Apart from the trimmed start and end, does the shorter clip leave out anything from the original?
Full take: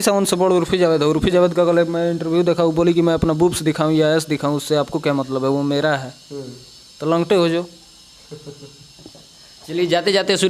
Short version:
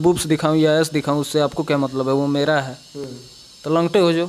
no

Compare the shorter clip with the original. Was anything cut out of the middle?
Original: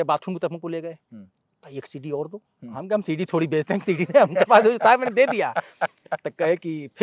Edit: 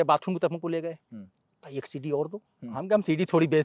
no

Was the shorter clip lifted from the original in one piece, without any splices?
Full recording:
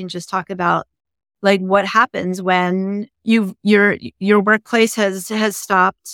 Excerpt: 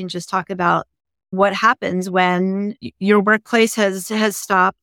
no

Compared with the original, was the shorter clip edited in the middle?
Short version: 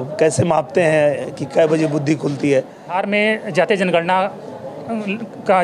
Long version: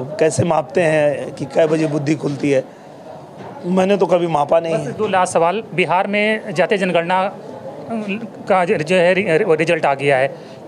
yes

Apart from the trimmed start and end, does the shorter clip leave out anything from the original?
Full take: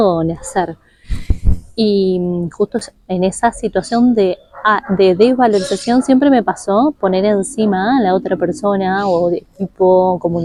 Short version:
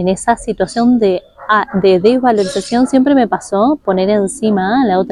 no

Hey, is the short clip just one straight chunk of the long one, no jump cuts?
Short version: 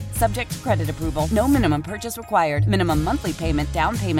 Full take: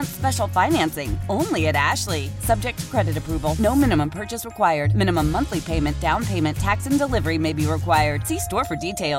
yes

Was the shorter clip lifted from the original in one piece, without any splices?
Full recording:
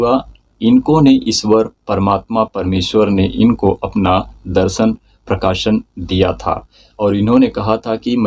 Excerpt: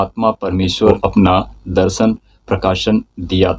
no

